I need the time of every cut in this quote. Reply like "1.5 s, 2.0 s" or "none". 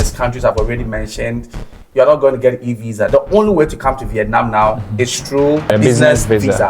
5.7 s